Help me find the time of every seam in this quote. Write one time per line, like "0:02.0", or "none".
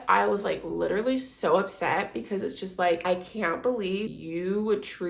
0:03.0
0:04.1